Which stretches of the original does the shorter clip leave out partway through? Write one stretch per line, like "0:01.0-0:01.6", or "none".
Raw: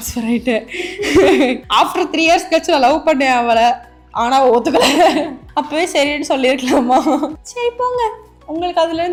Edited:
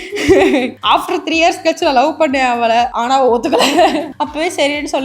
0:03.8-0:04.2
0:05.4-0:05.5